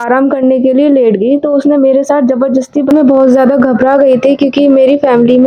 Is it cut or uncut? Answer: cut